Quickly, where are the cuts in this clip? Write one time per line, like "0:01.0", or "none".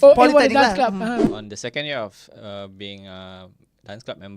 0:01.3